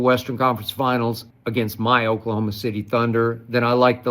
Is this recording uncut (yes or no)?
no